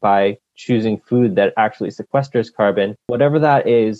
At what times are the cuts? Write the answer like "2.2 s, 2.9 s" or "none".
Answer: 3.0 s